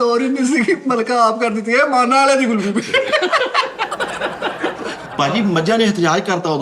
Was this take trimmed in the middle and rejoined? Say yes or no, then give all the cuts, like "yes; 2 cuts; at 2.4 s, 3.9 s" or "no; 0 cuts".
yes; 1 cut; at 5.0 s